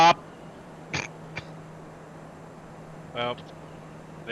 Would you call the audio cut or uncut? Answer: uncut